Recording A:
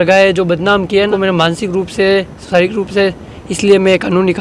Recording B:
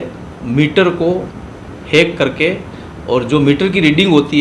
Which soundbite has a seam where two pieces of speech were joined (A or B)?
A